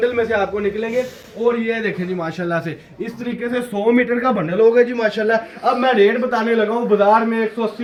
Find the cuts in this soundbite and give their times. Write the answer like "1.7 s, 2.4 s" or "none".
none

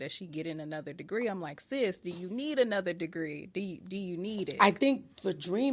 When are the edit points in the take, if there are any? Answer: 4.5 s

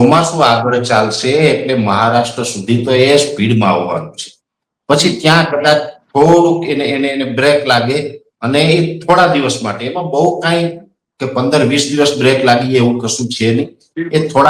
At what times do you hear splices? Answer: none

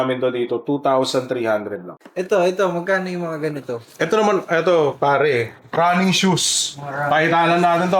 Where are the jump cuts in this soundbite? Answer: 2.0 s

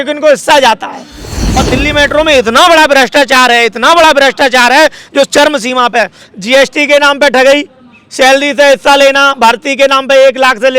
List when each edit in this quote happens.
1.4 s

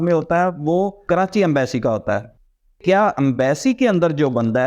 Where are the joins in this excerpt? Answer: 2.5 s

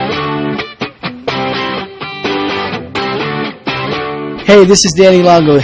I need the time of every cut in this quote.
none

